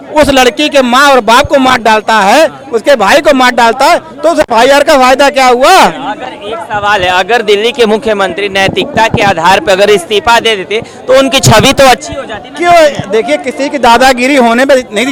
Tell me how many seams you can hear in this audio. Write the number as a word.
zero